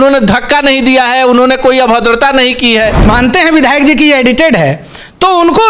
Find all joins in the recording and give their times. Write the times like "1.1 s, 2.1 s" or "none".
3.1 s